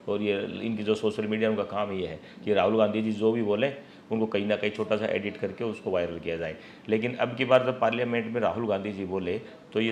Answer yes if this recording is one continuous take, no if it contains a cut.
yes